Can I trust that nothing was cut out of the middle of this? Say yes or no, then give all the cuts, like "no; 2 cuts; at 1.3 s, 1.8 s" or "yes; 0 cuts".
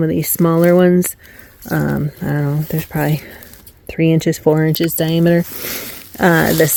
yes; 0 cuts